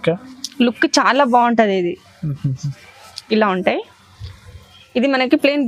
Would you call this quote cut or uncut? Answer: uncut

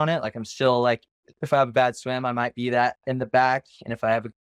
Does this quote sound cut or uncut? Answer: uncut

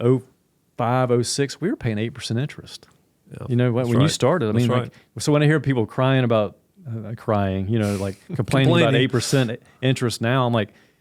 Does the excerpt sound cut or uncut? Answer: uncut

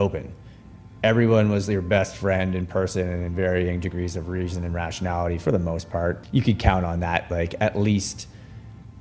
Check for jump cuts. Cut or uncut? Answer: cut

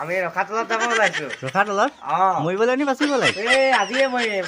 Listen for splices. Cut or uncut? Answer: uncut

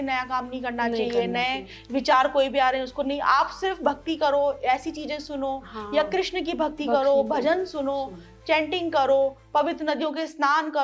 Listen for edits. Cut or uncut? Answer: uncut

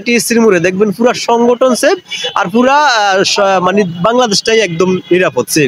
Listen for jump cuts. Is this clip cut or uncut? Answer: uncut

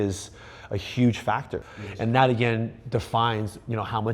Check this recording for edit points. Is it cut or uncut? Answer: uncut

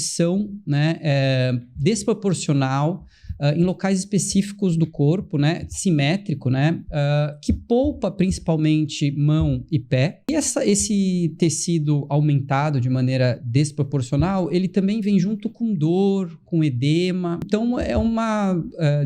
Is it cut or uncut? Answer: cut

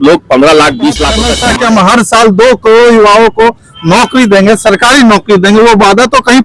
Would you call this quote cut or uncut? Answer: cut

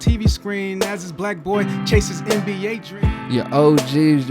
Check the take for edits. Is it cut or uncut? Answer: cut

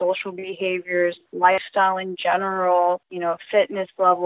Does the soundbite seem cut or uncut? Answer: cut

